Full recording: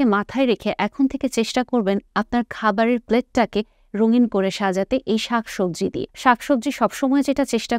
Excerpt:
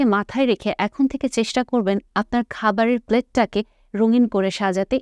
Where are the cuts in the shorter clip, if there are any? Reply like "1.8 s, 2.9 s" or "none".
none